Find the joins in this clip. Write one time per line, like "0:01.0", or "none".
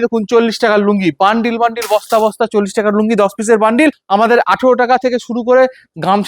0:04.0